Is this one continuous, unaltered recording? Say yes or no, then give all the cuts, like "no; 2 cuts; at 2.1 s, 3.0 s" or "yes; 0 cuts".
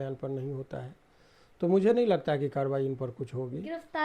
yes; 0 cuts